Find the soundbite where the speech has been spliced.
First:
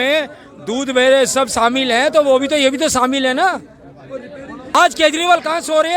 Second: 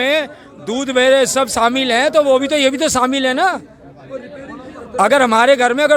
first; 1 cut; at 4.8 s

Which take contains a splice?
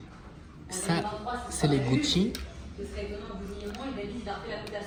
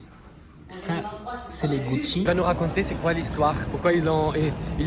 second; 1 cut; at 2.3 s

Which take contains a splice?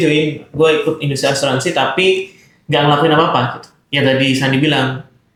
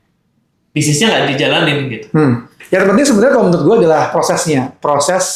second; 1 cut; at 2.5 s

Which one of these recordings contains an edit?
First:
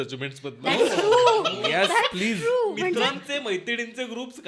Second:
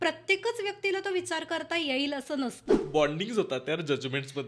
second; 1 cut; at 2.7 s

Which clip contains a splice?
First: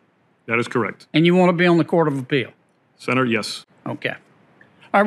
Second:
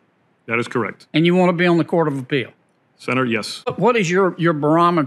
second; 1 cut; at 3.5 s

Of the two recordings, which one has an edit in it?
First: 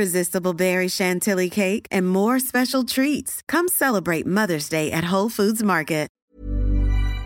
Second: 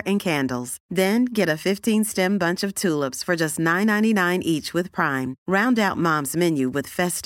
first; 1 cut; at 6.2 s

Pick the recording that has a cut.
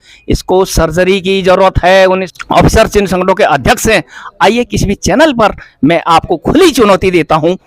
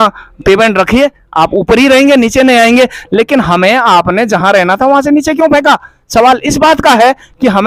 first; 1 cut; at 2.3 s

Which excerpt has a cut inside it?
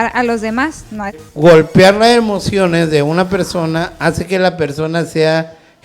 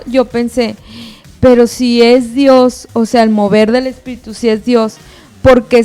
first; 1 cut; at 1.2 s

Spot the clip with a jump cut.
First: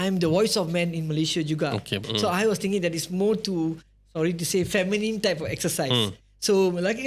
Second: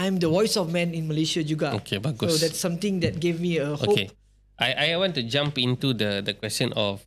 first; 1 cut; at 2.1 s

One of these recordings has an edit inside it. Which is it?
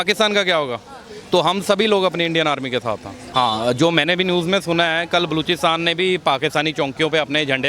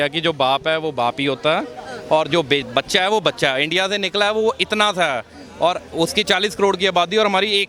first; 1 cut; at 3.2 s

